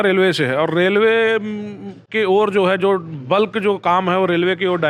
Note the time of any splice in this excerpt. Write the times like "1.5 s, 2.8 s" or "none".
none